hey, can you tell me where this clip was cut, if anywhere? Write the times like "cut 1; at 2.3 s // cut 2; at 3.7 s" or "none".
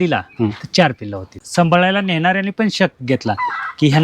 cut 1; at 1.4 s